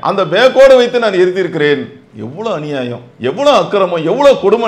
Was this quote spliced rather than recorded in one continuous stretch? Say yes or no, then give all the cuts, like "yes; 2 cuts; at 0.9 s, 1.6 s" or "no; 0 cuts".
no; 0 cuts